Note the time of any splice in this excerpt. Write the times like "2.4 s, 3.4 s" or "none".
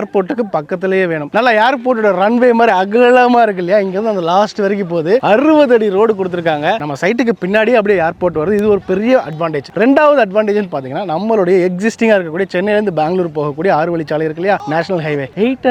1.2 s, 6.8 s